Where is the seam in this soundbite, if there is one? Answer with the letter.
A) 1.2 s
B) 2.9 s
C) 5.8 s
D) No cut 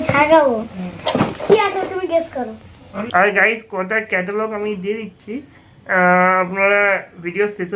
B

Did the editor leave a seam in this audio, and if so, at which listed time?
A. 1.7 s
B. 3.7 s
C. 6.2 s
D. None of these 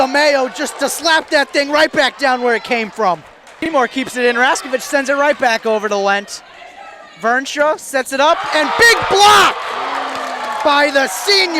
B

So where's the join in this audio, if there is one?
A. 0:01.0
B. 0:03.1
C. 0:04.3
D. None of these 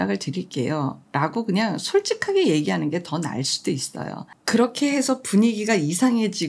D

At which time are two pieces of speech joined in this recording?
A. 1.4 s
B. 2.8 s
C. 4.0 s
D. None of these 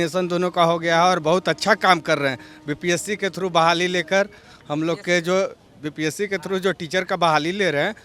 D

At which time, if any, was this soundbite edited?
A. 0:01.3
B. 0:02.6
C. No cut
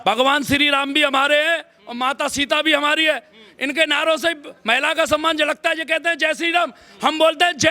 C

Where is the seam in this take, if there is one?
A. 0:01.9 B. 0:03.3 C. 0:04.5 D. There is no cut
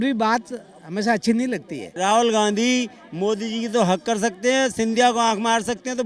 A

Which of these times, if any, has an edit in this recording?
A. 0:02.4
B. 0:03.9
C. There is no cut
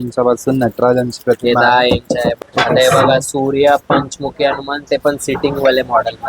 A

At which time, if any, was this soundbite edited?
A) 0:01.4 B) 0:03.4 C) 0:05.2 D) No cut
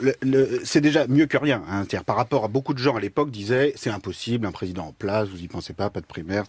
D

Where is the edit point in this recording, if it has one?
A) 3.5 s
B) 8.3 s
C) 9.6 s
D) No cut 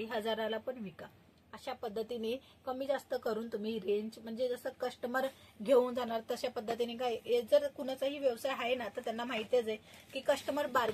D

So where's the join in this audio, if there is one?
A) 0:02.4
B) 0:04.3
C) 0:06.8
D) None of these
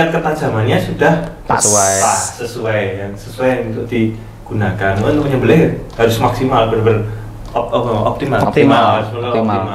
D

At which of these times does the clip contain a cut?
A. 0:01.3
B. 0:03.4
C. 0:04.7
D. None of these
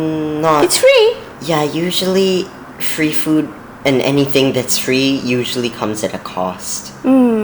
A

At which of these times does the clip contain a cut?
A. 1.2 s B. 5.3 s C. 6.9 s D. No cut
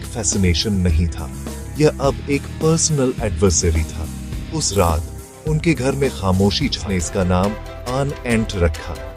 C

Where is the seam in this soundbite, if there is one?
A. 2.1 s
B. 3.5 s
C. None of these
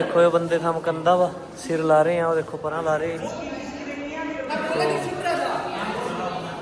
C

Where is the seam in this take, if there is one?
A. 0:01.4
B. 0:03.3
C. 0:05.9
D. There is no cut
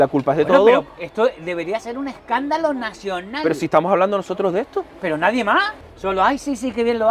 C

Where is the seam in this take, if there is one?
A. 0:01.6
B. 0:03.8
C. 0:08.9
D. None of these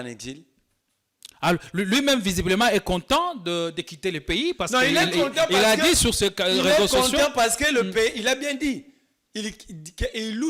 D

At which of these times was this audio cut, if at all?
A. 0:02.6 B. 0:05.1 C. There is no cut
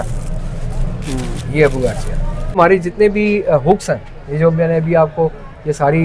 A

